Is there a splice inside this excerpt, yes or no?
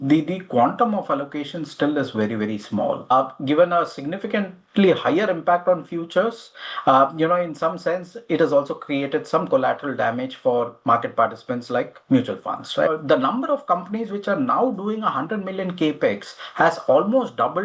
yes